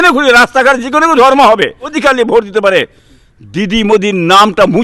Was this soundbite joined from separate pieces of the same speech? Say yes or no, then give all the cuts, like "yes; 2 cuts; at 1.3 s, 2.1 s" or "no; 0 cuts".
yes; 1 cut; at 2.0 s